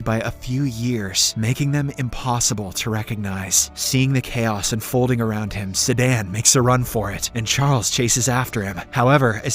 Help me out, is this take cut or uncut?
uncut